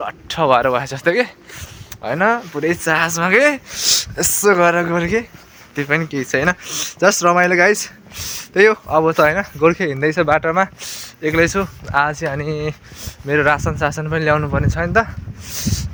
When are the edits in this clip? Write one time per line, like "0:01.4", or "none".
none